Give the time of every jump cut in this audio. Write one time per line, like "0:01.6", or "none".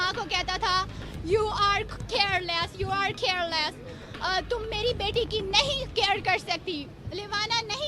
0:06.9